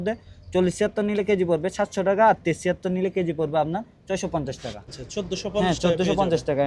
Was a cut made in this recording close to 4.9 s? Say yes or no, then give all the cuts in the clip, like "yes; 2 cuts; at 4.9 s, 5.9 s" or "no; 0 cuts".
yes; 1 cut; at 4.9 s